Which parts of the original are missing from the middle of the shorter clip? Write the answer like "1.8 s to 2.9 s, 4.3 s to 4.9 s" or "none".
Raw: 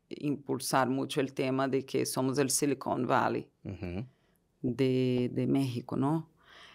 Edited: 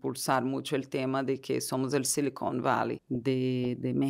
3.5 s to 4.5 s